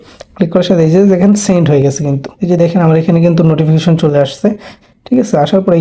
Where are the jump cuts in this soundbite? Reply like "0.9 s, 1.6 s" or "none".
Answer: 2.3 s, 4.8 s